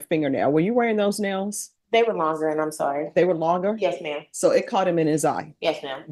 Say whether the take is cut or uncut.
uncut